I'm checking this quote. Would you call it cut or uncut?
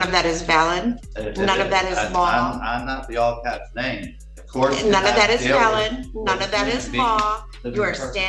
cut